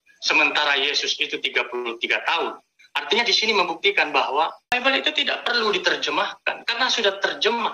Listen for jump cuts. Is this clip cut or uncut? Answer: cut